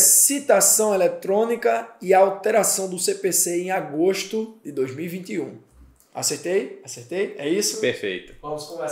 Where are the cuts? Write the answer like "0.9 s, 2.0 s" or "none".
none